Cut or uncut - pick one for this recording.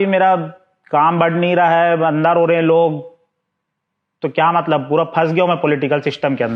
uncut